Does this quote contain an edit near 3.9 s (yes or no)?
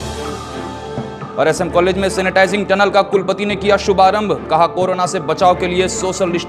no